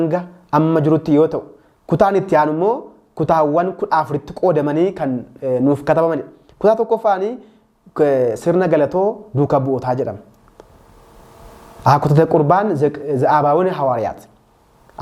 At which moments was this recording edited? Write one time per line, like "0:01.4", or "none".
none